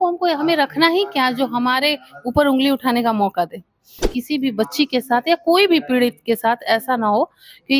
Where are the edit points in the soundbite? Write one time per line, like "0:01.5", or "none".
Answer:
0:04.1